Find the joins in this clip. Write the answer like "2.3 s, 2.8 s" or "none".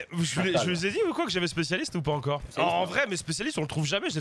2.5 s